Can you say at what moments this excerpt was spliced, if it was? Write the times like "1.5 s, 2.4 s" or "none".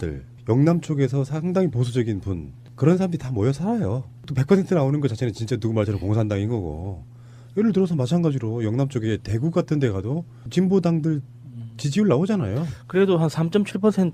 none